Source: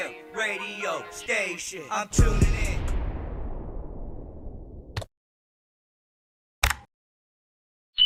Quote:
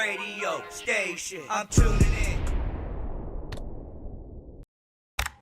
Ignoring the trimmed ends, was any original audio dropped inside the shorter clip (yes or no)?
yes